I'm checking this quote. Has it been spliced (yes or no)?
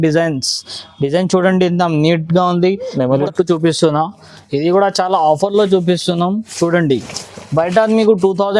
yes